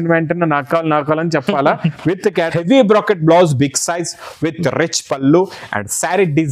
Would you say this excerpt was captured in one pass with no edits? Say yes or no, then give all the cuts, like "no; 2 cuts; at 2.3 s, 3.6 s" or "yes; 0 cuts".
no; 1 cut; at 2.5 s